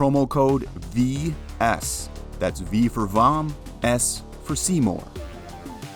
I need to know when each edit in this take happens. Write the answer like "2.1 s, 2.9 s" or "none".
5.1 s